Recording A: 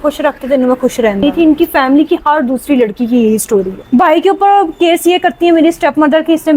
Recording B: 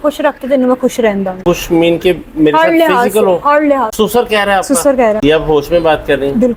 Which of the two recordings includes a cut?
A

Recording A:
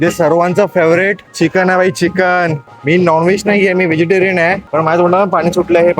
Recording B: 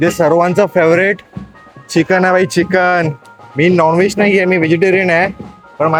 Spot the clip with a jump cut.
A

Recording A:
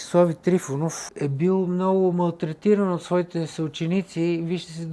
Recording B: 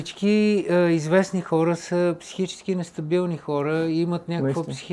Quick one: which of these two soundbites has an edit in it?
A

